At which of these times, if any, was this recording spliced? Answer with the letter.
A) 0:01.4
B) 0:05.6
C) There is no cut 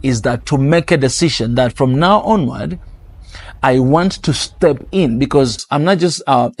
B